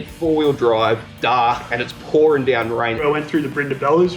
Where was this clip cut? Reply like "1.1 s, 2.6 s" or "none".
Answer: 1.1 s, 3.0 s

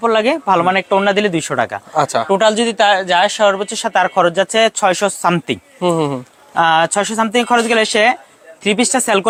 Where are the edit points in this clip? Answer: none

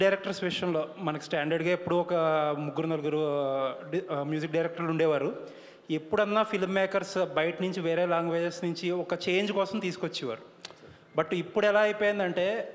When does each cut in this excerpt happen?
none

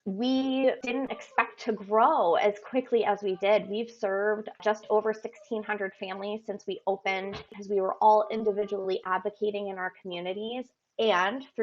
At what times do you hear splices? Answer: 0.8 s, 4.6 s, 7.4 s

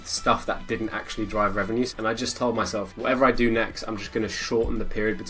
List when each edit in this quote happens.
1.9 s, 2.9 s

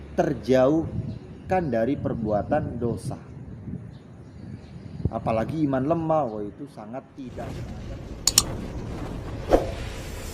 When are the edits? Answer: 7.1 s

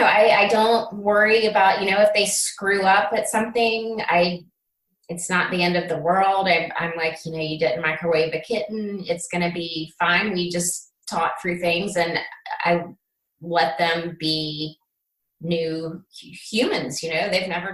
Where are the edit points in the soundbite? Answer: none

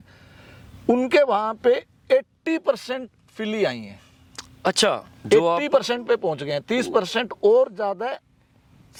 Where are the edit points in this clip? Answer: none

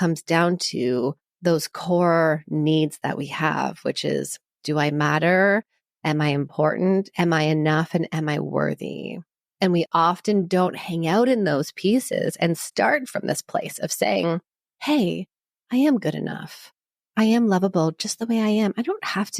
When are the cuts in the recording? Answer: 1.3 s

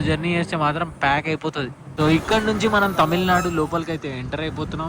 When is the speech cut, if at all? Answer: 1.8 s

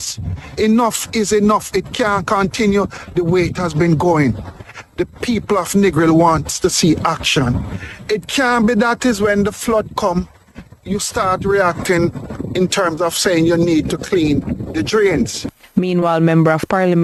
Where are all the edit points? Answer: none

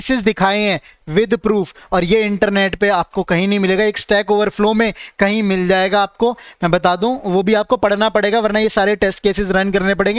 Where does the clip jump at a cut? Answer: none

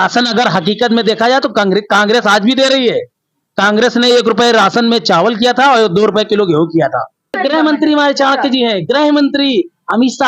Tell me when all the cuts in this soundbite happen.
7.4 s

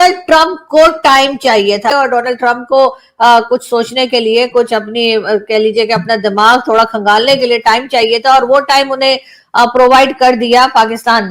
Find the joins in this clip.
1.8 s

